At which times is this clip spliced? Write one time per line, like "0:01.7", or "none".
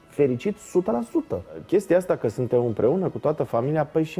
0:01.6